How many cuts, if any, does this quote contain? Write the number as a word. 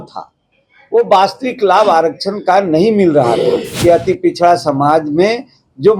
one